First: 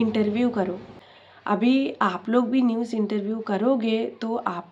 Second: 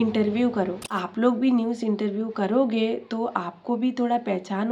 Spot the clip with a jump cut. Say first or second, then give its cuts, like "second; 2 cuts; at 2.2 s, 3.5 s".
second; 1 cut; at 1.0 s